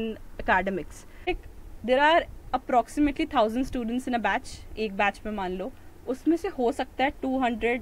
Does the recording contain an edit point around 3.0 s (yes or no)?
no